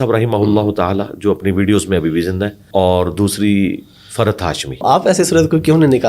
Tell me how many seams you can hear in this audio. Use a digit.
2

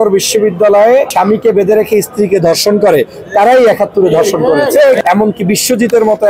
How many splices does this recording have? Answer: 2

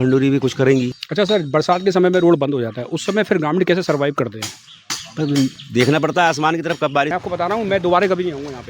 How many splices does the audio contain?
2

